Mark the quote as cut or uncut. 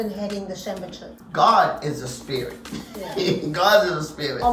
cut